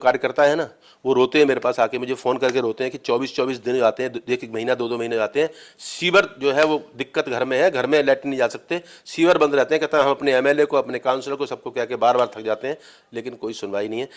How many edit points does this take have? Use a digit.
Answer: 0